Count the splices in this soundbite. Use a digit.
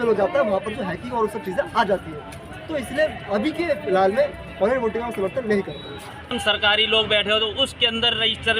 1